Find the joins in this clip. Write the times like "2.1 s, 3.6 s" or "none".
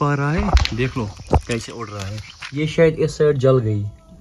2.4 s

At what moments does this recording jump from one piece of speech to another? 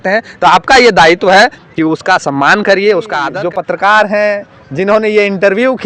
3.2 s

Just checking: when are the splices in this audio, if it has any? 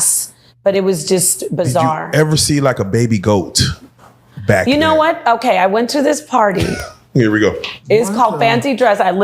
2.0 s

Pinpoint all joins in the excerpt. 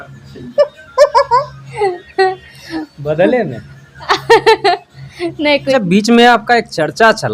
5.7 s

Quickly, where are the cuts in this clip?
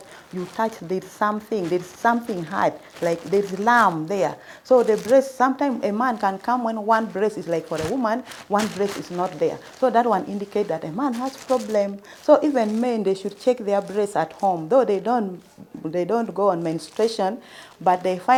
none

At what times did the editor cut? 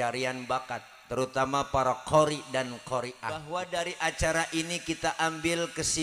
3.5 s

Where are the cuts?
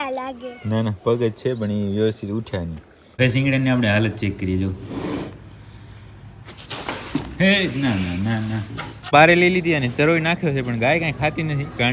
3.2 s, 9.1 s

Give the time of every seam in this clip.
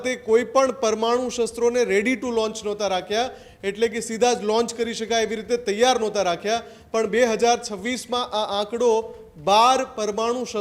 none

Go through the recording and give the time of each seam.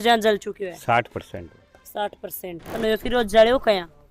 2.7 s

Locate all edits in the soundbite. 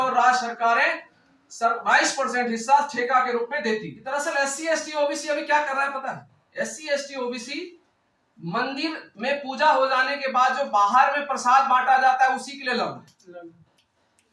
4.0 s

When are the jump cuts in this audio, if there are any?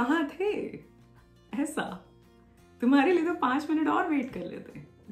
none

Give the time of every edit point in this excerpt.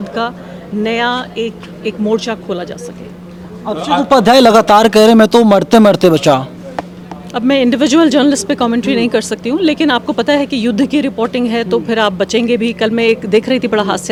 none

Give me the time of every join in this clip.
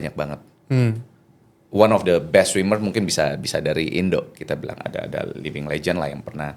1.6 s

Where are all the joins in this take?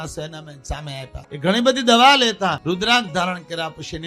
1.2 s, 2.6 s

